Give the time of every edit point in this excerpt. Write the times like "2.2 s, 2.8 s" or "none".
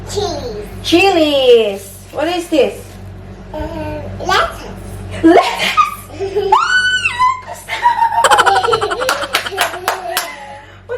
none